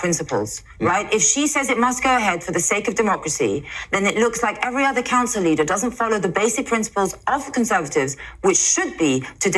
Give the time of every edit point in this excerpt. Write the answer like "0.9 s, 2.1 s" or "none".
none